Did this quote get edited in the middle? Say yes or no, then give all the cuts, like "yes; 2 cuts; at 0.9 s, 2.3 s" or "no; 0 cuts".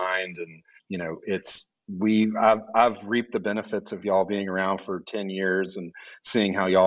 no; 0 cuts